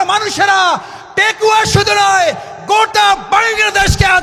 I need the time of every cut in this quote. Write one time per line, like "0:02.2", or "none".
none